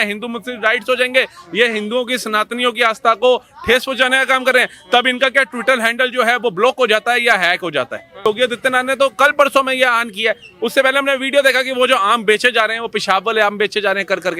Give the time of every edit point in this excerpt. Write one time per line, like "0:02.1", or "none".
0:08.2